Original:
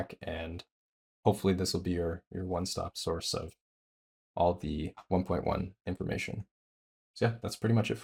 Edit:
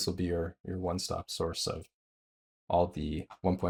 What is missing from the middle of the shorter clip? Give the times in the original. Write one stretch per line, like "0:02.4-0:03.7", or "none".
none